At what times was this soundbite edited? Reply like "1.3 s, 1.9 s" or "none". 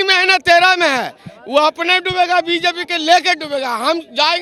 none